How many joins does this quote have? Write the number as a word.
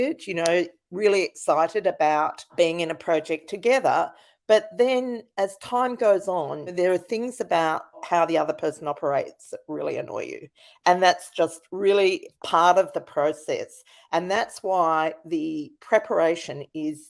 three